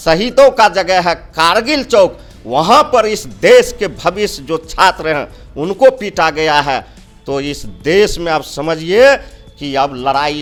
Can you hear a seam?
no; 0 cuts

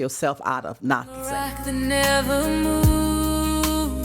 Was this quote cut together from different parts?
yes; 1 cut; at 1.1 s

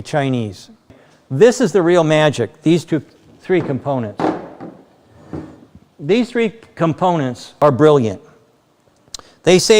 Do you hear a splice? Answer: yes; 2 cuts; at 1.0 s, 7.4 s

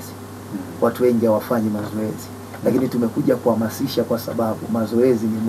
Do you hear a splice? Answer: no; 0 cuts

